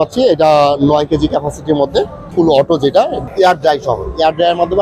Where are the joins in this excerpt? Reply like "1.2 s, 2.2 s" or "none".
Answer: 2.3 s, 3.2 s